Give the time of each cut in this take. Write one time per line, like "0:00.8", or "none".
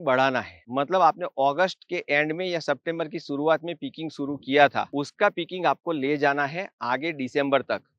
none